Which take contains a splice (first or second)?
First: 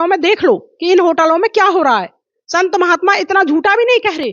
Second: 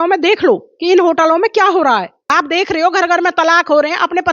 second